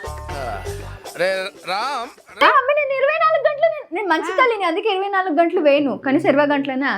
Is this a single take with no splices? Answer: no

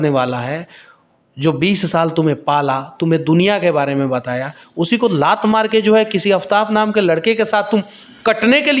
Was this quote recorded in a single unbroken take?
yes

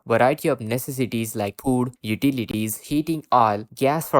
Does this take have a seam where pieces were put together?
no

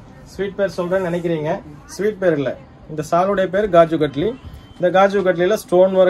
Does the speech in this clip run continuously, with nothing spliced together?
yes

